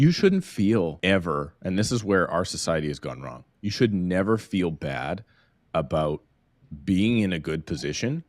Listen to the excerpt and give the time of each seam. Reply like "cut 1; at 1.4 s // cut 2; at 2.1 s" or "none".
cut 1; at 1.0 s